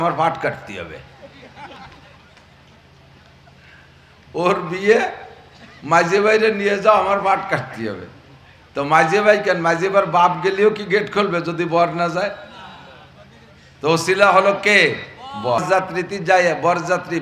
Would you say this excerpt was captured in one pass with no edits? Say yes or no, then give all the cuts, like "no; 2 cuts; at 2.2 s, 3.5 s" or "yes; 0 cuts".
no; 1 cut; at 15.6 s